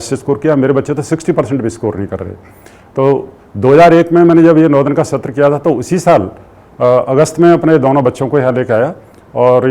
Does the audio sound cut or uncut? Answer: uncut